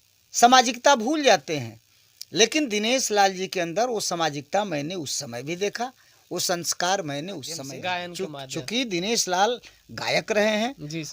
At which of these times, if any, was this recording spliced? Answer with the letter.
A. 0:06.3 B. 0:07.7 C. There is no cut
B